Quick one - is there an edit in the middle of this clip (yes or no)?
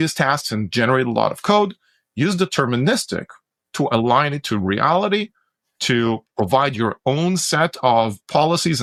no